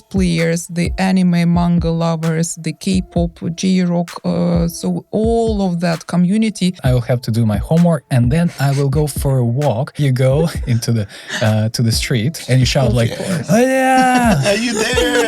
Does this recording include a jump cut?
yes; 3 cuts; at 6.8 s, 10.0 s, 12.4 s

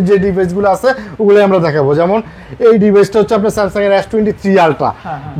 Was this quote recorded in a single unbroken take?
yes; 0 cuts

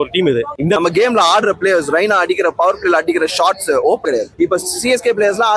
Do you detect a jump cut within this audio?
yes; 2 cuts; at 0.8 s, 4.0 s

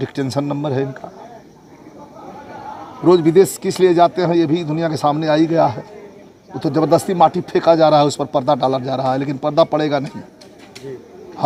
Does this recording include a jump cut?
no; 0 cuts

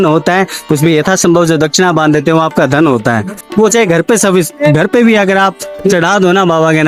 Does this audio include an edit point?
no; 0 cuts

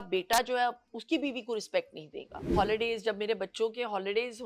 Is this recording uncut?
no; 1 cut; at 2.5 s

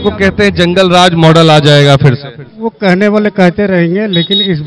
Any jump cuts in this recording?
no; 0 cuts

